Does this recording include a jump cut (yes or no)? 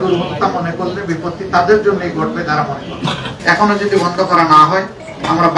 yes